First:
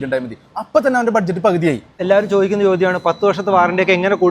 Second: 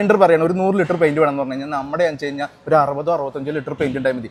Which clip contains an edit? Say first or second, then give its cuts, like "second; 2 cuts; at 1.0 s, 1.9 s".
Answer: first; 1 cut; at 1.9 s